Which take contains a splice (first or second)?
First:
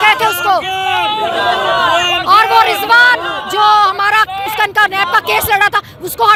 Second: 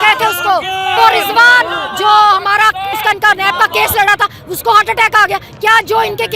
second